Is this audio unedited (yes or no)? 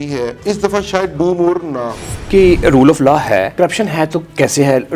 no